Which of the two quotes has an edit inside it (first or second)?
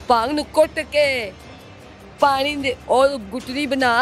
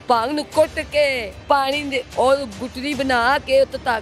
second